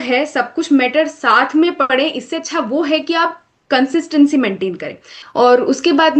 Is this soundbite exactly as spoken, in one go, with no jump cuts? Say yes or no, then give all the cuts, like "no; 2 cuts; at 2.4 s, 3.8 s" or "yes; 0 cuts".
no; 1 cut; at 5.2 s